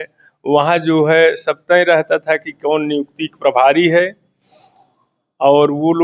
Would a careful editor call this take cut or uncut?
uncut